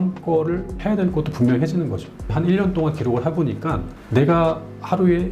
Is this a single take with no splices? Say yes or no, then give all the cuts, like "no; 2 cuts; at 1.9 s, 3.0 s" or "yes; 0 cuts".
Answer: no; 1 cut; at 2.3 s